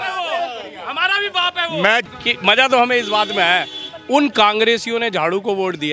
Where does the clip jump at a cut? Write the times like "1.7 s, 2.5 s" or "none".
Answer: 2.0 s